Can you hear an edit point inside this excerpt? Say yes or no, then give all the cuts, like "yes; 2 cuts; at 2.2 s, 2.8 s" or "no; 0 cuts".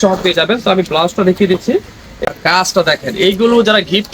yes; 1 cut; at 2.2 s